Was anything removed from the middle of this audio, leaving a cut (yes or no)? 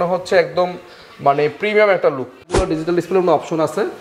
yes